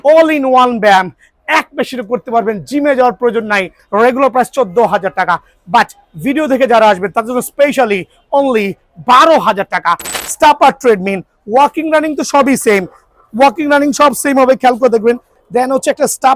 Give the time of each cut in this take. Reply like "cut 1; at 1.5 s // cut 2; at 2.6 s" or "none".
cut 1; at 3.8 s // cut 2; at 10.2 s // cut 3; at 15.4 s